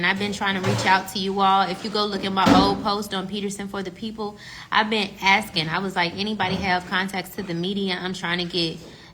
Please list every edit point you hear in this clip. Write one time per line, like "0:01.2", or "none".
none